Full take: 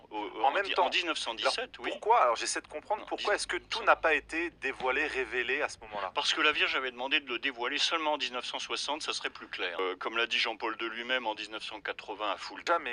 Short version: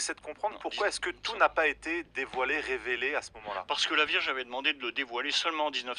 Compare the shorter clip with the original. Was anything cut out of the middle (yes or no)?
no